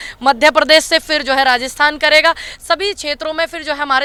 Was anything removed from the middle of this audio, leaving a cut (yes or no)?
no